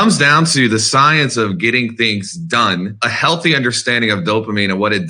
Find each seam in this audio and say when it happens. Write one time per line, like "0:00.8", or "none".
0:03.1